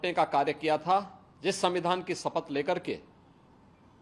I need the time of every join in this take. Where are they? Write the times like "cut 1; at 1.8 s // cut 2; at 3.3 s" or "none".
cut 1; at 1.2 s